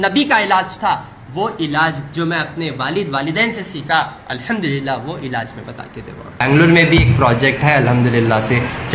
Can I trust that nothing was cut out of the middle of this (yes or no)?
no